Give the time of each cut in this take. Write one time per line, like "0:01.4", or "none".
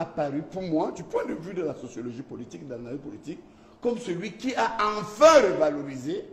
none